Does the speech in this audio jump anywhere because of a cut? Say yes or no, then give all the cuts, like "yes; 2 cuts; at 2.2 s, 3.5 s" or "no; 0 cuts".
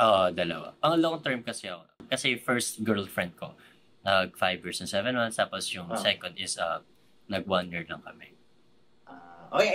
yes; 1 cut; at 1.9 s